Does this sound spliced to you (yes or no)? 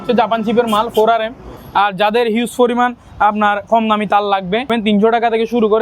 yes